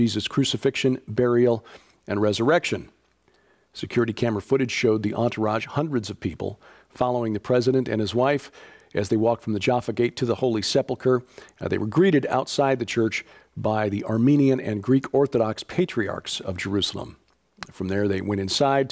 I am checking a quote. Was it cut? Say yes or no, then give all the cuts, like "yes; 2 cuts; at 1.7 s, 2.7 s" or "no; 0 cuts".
no; 0 cuts